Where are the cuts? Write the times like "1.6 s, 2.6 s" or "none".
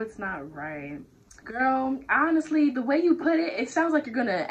none